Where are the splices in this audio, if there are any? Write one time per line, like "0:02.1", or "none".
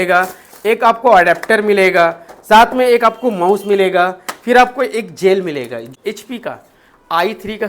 0:05.8

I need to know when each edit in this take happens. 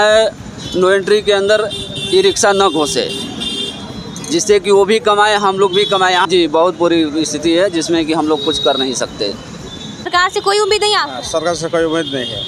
0:06.3
0:10.1

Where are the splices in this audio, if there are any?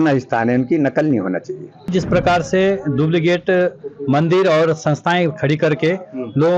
0:01.9

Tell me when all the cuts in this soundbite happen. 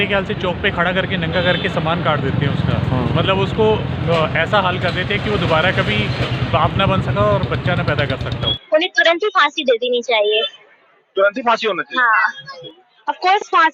0:08.5
0:12.6

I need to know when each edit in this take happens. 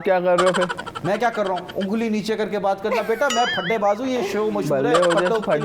none

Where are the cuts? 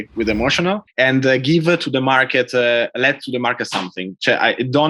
none

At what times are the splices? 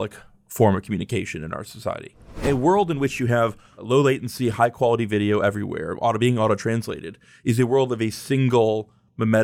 0:02.4
0:03.8

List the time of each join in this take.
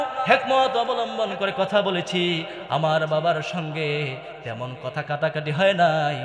none

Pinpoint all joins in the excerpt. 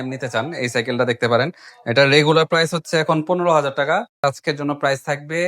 0:04.2

